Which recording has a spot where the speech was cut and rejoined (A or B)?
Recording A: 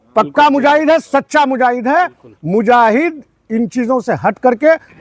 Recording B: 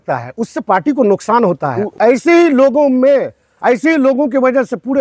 B